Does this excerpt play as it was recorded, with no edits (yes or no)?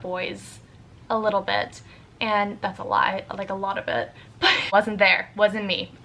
no